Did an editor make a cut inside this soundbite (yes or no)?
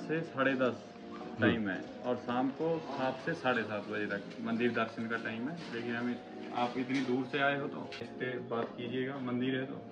yes